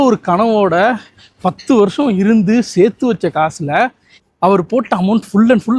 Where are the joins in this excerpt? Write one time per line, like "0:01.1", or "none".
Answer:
0:04.1